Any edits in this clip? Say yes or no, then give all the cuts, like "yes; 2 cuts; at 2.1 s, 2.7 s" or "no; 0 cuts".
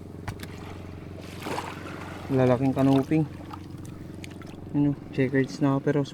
no; 0 cuts